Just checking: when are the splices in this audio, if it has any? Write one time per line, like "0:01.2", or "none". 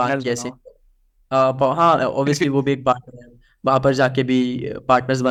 none